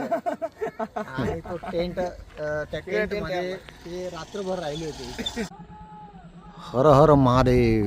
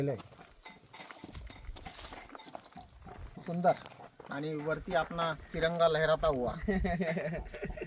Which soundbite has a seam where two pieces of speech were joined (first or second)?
first